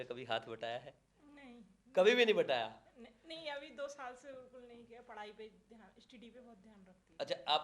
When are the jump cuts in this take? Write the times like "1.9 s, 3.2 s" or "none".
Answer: none